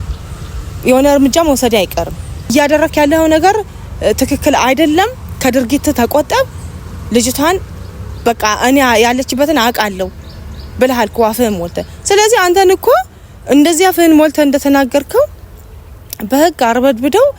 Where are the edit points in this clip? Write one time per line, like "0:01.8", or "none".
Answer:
0:02.5